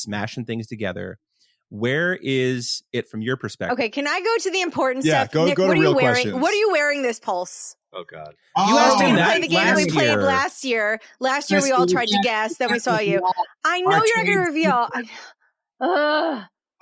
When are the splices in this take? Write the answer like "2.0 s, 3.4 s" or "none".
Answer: 3.7 s